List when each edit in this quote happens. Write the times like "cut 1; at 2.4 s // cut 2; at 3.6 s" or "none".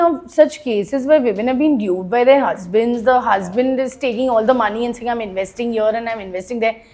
none